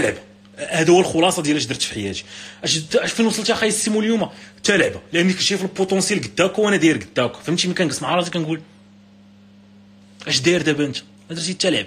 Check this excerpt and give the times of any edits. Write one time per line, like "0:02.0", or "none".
none